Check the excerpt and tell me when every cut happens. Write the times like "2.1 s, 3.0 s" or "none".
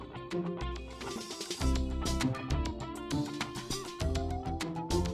0.9 s